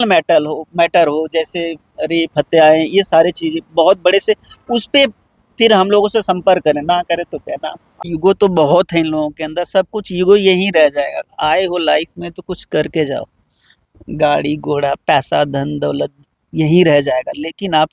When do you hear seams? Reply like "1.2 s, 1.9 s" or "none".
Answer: 8.0 s